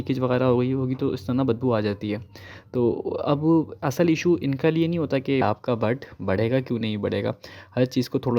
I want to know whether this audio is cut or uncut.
cut